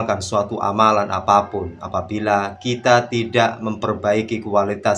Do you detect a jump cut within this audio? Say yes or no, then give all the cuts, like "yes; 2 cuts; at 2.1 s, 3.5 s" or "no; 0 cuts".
no; 0 cuts